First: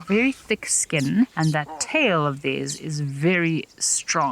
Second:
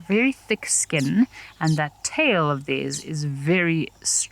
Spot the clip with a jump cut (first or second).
first